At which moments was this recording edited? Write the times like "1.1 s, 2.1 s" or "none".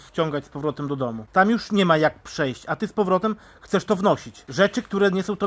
1.2 s, 4.4 s